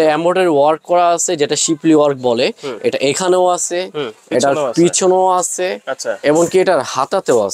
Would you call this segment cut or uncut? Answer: uncut